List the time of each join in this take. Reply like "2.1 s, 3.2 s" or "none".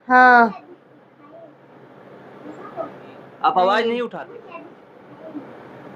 4.1 s